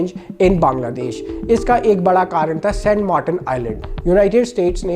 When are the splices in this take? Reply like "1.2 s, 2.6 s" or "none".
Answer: none